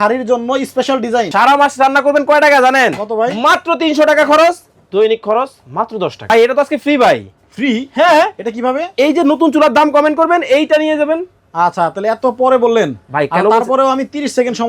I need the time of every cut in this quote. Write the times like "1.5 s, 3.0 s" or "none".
1.3 s, 6.3 s